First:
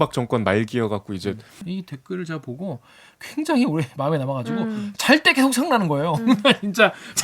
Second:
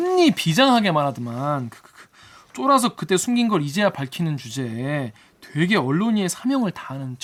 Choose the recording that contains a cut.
first; 1 cut; at 1.6 s

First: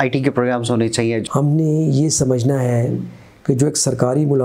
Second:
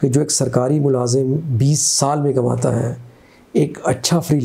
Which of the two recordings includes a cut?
first; 1 cut; at 1.2 s

